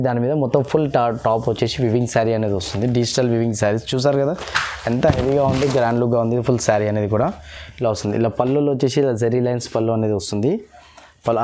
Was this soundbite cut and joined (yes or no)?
no